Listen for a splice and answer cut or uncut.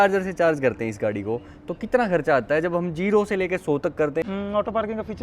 cut